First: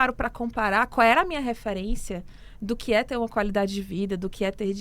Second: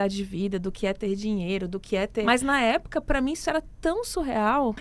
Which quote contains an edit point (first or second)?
second